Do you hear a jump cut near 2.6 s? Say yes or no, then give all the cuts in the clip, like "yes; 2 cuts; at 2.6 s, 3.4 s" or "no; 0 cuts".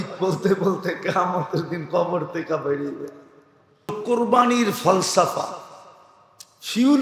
no; 1 cut; at 4.0 s